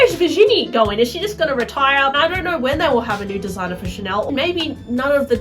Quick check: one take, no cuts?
no; 2 cuts; at 2.2 s, 4.3 s

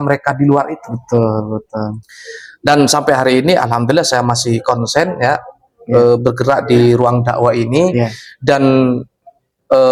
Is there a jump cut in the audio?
no; 0 cuts

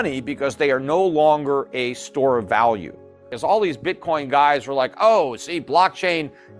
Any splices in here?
yes; 1 cut; at 3.2 s

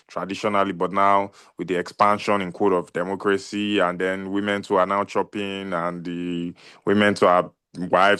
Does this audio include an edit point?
no; 0 cuts

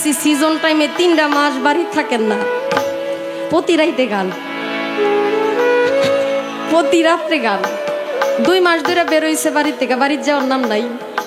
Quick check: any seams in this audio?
no; 0 cuts

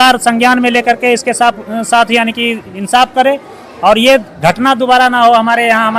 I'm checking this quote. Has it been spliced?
no; 0 cuts

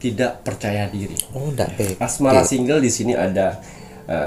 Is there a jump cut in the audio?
yes; 1 cut; at 2.0 s

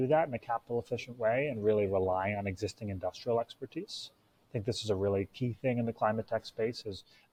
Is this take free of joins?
yes; 0 cuts

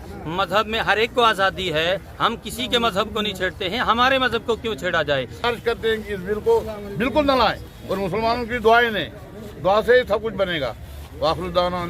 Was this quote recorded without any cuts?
no; 1 cut; at 5.4 s

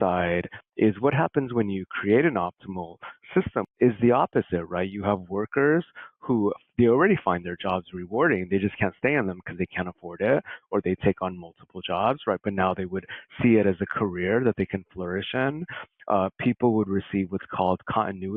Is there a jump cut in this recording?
yes; 1 cut; at 3.7 s

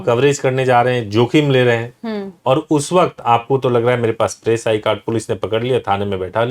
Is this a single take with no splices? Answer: yes; 0 cuts

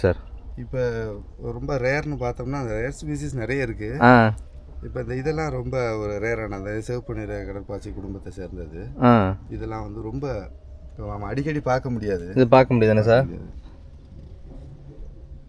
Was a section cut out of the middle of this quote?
no; 0 cuts

